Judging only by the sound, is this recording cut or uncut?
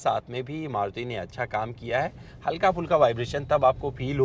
uncut